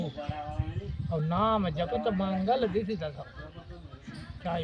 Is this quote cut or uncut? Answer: uncut